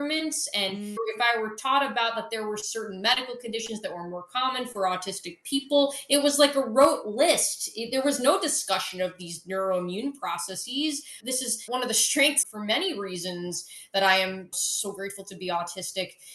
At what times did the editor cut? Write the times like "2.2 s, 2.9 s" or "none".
1.0 s, 11.2 s

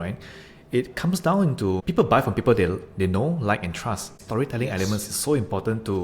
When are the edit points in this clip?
1.8 s, 4.2 s

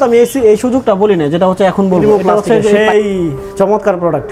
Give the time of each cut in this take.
2.7 s

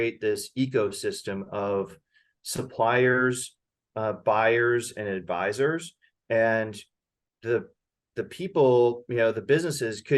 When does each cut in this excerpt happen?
none

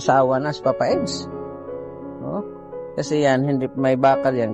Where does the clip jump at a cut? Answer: 2.1 s

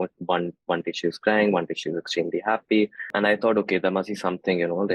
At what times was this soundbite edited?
3.1 s

